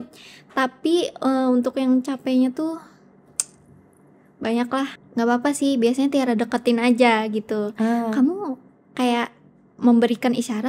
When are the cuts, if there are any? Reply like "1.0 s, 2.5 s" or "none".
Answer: 5.0 s

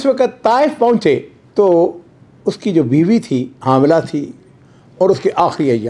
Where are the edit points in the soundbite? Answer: 3.5 s

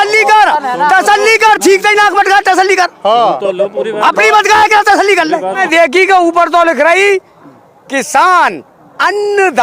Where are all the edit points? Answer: 5.6 s

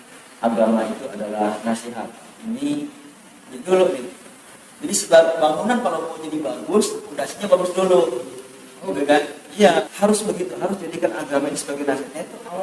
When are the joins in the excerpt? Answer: 3.5 s, 9.9 s

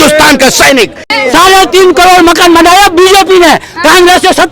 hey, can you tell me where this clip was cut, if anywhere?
1.1 s

